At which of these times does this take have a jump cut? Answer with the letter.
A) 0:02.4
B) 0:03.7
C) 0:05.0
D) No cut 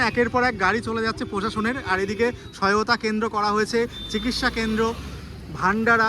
D